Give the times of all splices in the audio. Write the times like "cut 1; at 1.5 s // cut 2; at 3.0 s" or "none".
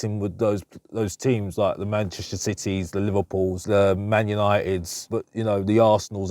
cut 1; at 3.6 s // cut 2; at 5.1 s